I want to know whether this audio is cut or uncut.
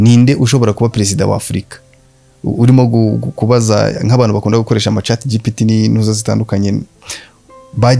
uncut